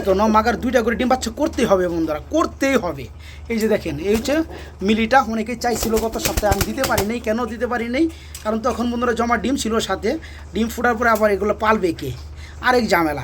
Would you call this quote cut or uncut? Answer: uncut